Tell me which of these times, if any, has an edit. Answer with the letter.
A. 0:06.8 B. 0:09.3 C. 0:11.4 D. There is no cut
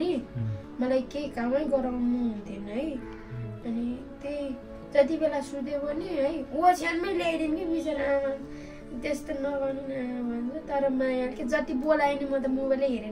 D